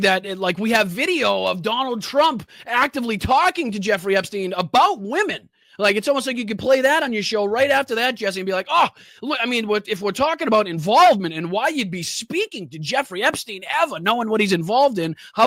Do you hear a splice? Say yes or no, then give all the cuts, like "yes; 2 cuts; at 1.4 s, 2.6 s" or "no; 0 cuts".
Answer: no; 0 cuts